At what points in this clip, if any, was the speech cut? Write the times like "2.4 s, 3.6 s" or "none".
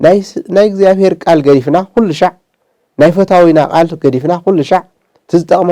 none